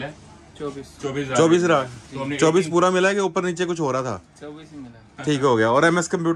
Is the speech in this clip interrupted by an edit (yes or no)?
no